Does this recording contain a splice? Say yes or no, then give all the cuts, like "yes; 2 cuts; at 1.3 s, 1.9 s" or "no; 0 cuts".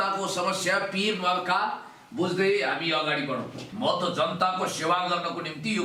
yes; 1 cut; at 3.7 s